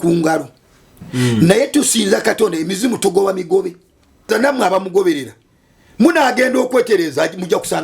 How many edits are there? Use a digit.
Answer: 1